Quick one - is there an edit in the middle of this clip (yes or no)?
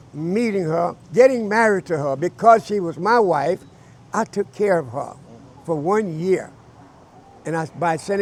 no